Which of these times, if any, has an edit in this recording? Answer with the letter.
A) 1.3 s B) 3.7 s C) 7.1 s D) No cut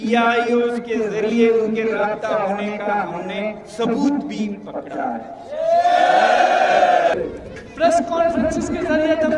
C